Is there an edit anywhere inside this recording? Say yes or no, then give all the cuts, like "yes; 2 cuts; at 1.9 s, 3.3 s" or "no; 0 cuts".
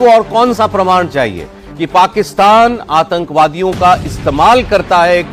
no; 0 cuts